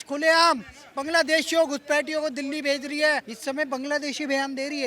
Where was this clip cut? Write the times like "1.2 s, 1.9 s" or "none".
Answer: 3.2 s